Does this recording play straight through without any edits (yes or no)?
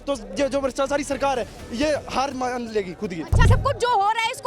no